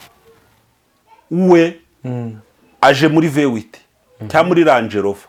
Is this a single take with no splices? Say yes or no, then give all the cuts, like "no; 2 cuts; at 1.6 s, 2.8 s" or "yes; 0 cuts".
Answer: yes; 0 cuts